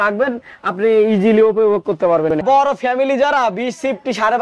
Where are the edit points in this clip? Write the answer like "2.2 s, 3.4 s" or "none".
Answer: 2.4 s